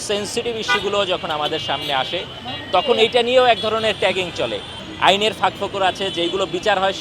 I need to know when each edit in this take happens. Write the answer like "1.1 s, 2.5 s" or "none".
4.8 s

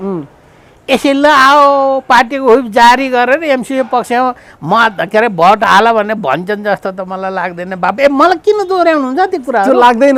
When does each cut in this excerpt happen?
none

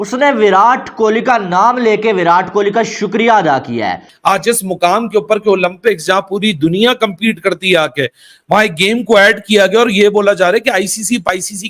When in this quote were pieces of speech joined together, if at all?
4.1 s

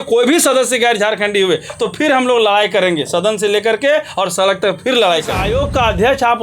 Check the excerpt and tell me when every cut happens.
5.4 s

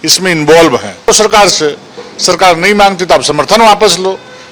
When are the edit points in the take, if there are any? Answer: none

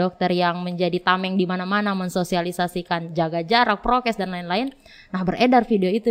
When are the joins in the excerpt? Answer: none

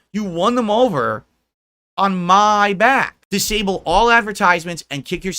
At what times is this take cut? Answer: 3.2 s

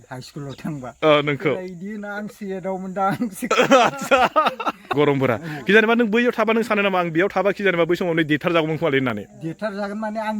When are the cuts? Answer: 4.8 s

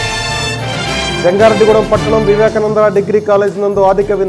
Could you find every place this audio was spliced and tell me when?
1.0 s

